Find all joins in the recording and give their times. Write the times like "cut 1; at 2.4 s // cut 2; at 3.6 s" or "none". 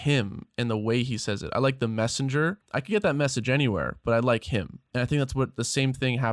cut 1; at 2.7 s // cut 2; at 4.8 s